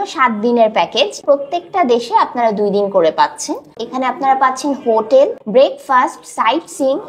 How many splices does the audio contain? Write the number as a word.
three